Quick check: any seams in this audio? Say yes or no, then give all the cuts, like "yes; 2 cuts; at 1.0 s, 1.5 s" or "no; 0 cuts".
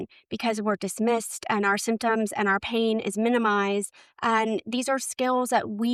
no; 0 cuts